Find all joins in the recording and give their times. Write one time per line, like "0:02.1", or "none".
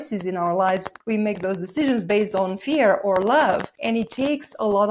0:00.9
0:03.7